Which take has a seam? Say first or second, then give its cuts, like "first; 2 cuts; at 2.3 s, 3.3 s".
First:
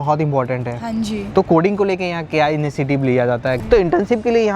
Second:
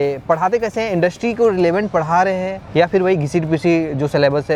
first; 1 cut; at 3.6 s